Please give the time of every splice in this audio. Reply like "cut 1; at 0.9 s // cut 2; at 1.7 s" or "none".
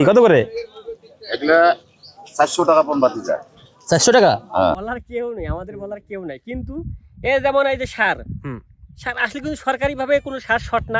cut 1; at 4.8 s